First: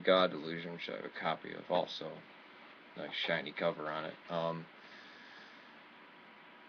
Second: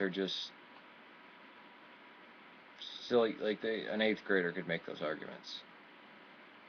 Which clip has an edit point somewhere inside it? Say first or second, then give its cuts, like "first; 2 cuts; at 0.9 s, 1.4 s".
second; 1 cut; at 1.2 s